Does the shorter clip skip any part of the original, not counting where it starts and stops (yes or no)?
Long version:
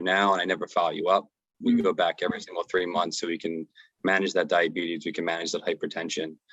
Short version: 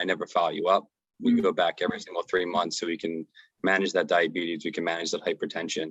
no